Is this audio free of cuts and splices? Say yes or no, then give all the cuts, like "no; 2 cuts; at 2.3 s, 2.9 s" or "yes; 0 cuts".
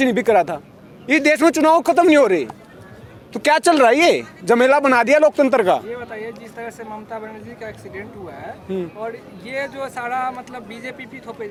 yes; 0 cuts